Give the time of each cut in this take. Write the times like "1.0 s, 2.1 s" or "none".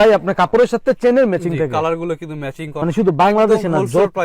2.8 s